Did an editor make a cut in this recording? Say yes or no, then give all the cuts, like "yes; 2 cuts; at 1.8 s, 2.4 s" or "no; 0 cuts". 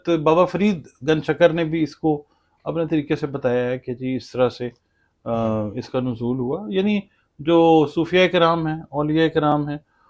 no; 0 cuts